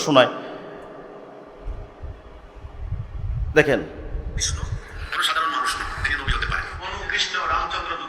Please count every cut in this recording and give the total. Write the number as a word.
zero